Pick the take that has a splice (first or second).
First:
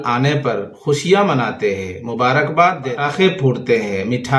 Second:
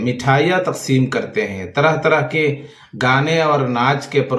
first